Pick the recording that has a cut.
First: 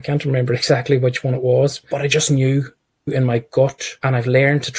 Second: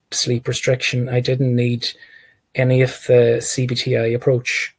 first; 3 cuts; at 1.8 s, 3.1 s, 3.9 s

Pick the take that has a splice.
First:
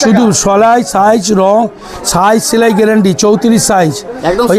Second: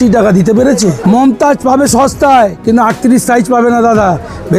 second; 1 cut; at 1.0 s

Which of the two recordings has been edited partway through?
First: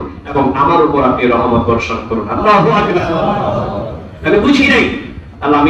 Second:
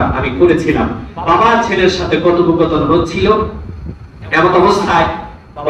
second; 1 cut; at 1.1 s

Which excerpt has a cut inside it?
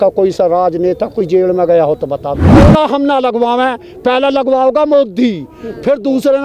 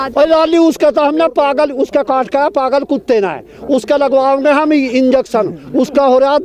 first; 1 cut; at 2.6 s

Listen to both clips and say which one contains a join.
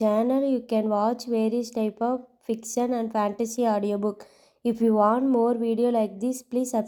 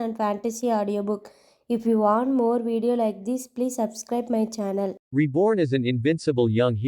second; 1 cut; at 5.0 s

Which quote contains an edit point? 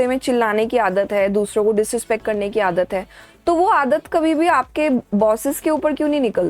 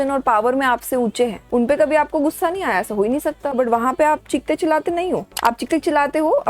second; 3 cuts; at 1.4 s, 3.5 s, 5.3 s

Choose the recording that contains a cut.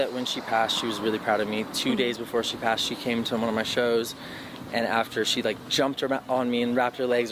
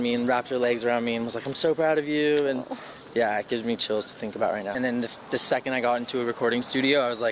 second; 1 cut; at 4.7 s

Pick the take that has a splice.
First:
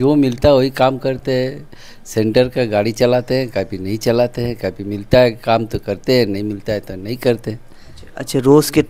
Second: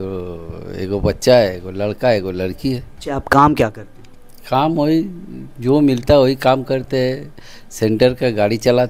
second; 1 cut; at 2.9 s

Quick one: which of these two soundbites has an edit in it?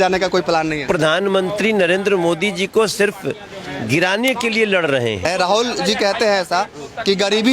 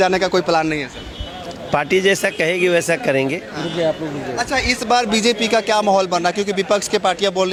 first; 2 cuts; at 0.8 s, 5.3 s

